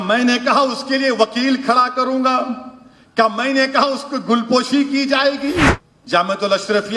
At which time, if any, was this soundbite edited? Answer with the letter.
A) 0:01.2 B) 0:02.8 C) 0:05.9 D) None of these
C